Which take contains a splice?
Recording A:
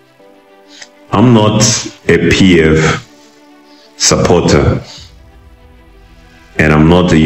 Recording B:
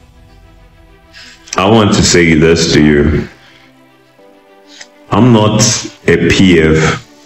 B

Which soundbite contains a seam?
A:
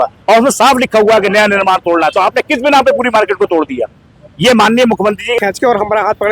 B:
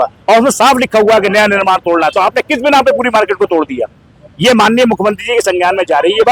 A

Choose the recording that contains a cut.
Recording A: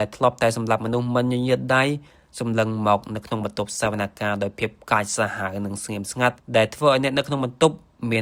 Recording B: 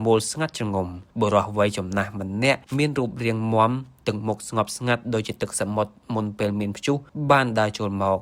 B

